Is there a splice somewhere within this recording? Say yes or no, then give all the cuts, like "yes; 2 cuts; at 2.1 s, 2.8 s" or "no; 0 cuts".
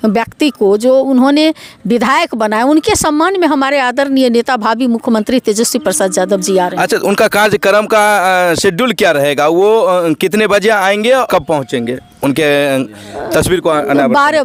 no; 0 cuts